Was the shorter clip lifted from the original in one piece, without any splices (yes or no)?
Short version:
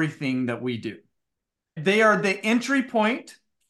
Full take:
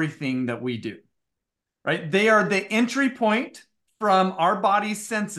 no